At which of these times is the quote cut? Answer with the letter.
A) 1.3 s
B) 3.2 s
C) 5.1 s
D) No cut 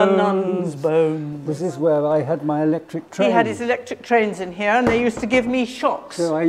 A